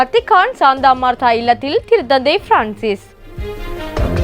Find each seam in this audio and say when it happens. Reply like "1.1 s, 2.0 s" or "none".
3.3 s